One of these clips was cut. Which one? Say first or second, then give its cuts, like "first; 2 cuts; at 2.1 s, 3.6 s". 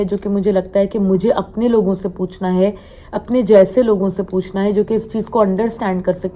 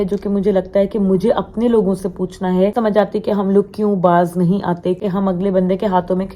second; 2 cuts; at 2.7 s, 5.0 s